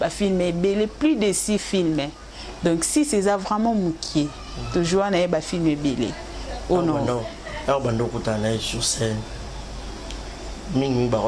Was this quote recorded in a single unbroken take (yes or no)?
yes